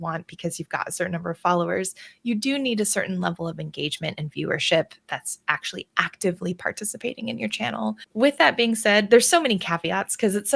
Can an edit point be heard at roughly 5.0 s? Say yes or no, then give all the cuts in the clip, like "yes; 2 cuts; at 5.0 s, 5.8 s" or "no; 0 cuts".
no; 1 cut; at 8.0 s